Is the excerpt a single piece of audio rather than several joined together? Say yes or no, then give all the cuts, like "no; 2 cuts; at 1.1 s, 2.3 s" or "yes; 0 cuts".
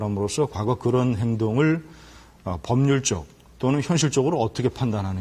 yes; 0 cuts